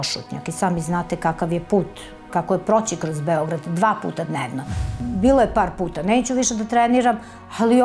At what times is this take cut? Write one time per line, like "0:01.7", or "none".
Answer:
0:04.8